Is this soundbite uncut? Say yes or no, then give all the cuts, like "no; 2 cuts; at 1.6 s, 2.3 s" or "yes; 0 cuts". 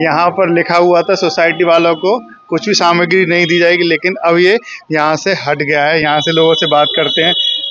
yes; 0 cuts